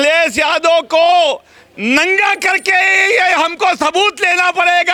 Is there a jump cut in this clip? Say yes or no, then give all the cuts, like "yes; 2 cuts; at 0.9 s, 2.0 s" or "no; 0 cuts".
no; 0 cuts